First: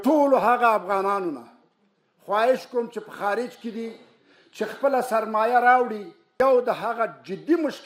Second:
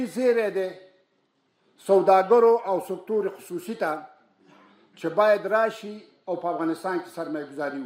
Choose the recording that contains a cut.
first; 1 cut; at 6.2 s

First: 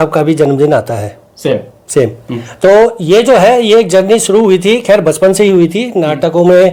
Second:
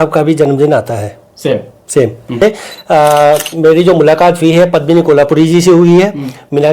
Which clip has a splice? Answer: second; 1 cut; at 2.4 s

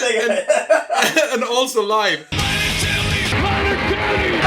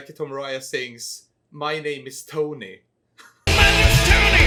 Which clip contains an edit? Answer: first; 1 cut; at 2.3 s

